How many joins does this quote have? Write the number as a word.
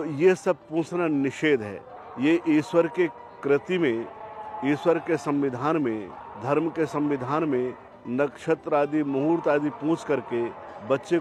zero